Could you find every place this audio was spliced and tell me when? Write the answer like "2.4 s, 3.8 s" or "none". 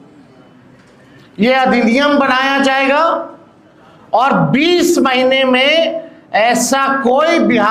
none